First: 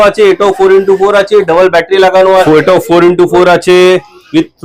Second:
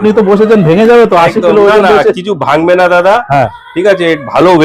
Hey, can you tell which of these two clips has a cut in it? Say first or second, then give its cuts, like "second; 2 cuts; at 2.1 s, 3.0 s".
first; 1 cut; at 2.4 s